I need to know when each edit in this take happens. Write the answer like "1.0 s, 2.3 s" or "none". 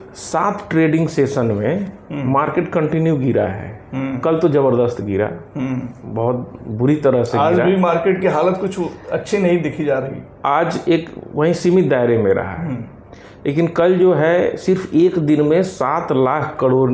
none

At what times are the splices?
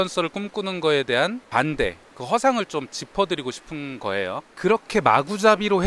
1.4 s, 4.5 s

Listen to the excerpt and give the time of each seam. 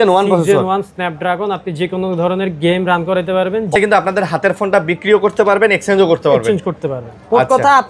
3.8 s

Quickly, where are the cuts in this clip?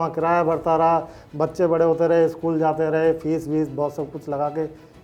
none

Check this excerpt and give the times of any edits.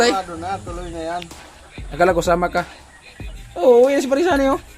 1.3 s

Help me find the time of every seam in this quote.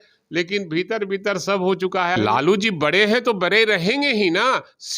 2.2 s

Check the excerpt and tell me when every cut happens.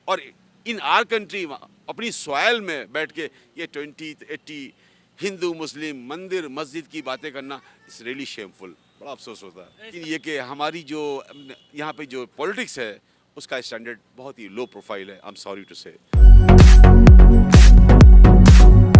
10.0 s, 16.1 s

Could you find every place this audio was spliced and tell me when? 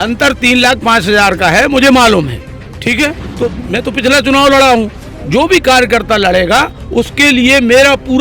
3.2 s

